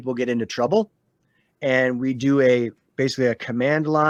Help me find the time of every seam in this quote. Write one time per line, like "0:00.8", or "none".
none